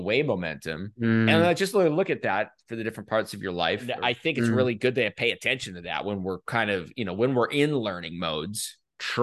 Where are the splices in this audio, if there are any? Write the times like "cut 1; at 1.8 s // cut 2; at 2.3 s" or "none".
cut 1; at 3.9 s